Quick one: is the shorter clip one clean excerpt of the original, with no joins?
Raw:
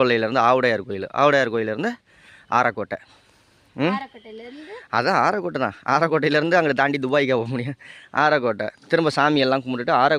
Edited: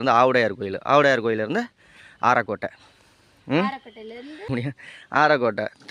no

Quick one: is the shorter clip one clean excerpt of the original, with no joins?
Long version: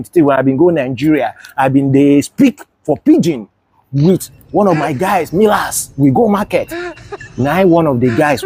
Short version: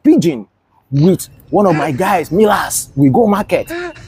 yes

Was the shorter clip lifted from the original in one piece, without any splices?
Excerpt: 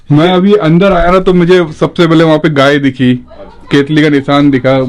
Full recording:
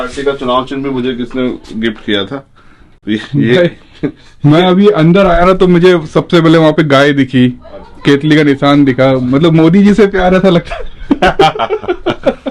yes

